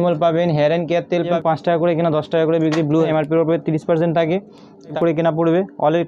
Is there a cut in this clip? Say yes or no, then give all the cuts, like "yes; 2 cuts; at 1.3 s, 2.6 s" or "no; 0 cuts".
yes; 3 cuts; at 1.3 s, 3.1 s, 4.9 s